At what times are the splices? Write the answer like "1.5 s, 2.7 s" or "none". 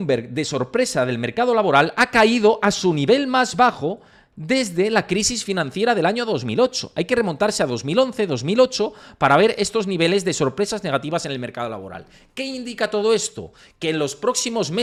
none